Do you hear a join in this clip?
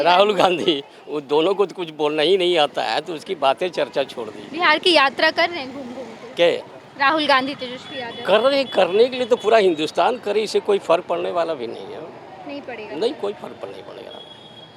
no; 0 cuts

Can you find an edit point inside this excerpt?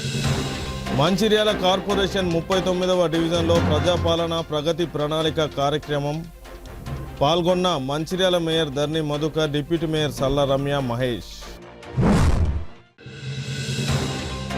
yes; 1 cut; at 0.9 s

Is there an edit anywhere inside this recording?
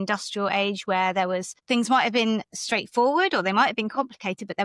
no; 0 cuts

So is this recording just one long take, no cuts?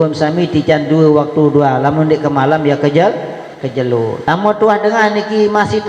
no; 1 cut; at 4.2 s

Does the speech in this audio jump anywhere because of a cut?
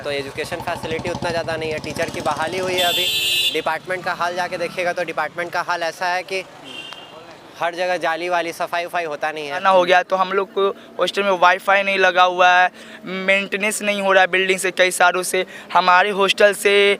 yes; 1 cut; at 9.6 s

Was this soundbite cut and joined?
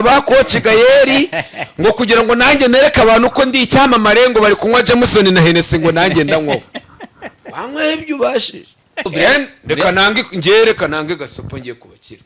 yes; 1 cut; at 9.1 s

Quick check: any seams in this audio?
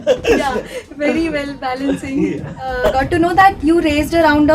yes; 1 cut; at 2.8 s

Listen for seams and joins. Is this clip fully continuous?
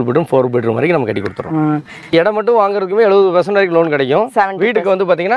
no; 1 cut; at 2.1 s

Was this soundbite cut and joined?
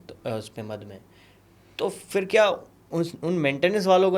no; 0 cuts

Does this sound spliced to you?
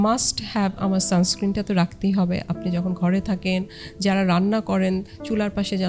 no; 0 cuts

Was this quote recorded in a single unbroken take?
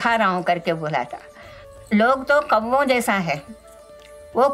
no; 1 cut; at 1.6 s

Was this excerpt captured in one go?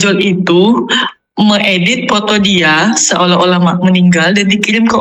yes; 0 cuts

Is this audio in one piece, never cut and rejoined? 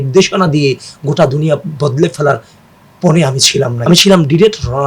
no; 1 cut; at 3.8 s

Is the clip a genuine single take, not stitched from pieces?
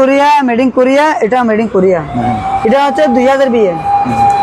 yes; 0 cuts

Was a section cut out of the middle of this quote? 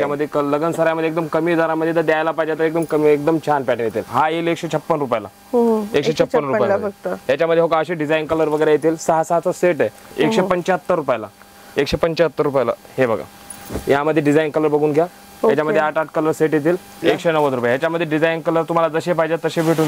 yes; 3 cuts; at 4.0 s, 10.0 s, 17.0 s

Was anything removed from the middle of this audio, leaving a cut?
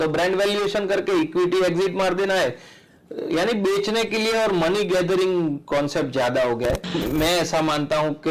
yes; 1 cut; at 6.9 s

